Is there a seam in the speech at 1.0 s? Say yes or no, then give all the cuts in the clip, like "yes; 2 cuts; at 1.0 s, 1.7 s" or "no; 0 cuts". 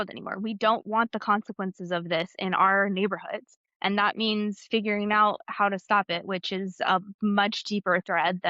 no; 0 cuts